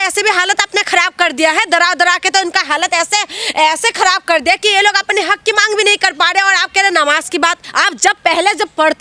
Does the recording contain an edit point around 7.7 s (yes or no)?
yes